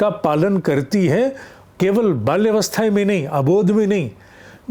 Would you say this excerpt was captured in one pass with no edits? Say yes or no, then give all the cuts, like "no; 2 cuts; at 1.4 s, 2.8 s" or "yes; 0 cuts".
yes; 0 cuts